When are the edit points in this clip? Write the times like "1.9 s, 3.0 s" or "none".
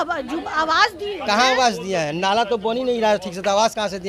none